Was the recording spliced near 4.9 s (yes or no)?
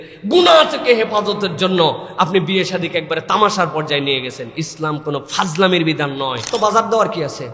no